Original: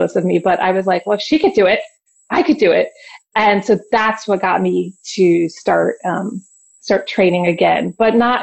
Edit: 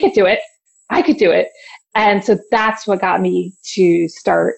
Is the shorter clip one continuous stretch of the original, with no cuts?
yes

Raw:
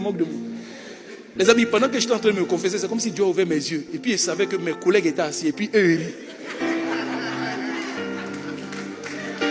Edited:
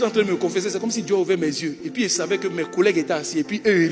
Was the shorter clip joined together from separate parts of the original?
no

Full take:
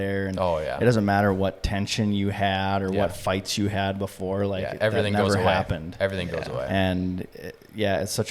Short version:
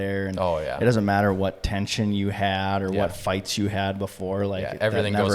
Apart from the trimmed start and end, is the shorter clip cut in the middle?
no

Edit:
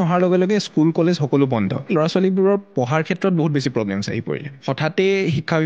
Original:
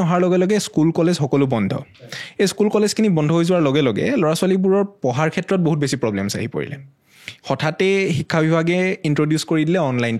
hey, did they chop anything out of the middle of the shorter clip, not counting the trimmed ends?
yes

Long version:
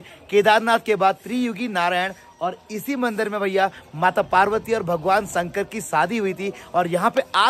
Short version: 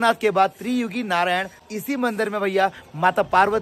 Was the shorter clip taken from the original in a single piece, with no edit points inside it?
no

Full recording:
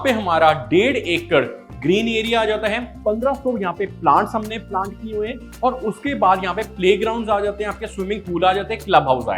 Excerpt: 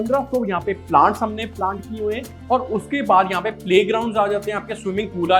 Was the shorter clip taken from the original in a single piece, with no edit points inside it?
yes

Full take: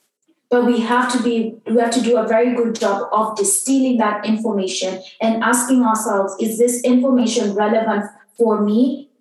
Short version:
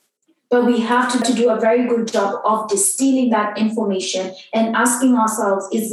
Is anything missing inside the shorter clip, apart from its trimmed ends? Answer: yes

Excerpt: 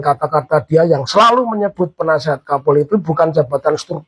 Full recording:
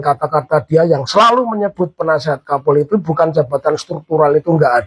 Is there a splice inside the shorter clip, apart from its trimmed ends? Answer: no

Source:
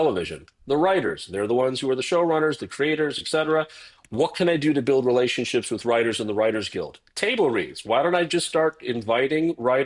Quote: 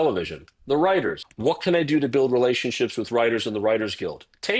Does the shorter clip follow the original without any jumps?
no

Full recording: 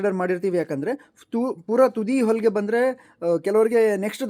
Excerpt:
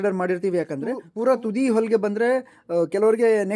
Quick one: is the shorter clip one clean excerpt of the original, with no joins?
no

